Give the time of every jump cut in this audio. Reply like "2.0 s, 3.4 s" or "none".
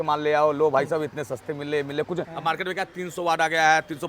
2.3 s